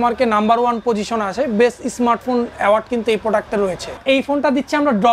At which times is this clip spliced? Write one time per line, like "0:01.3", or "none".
0:04.0